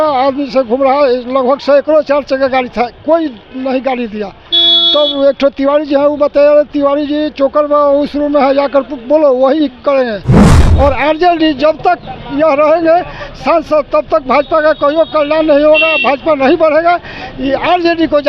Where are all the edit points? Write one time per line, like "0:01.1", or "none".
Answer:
0:10.6